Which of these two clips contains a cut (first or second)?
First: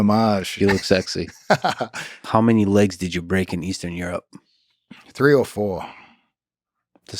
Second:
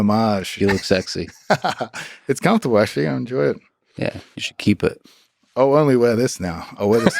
first